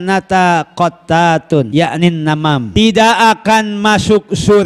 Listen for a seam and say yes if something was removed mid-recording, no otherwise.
yes